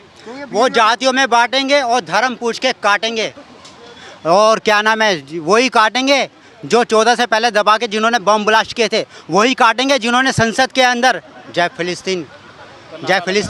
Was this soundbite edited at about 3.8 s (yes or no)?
no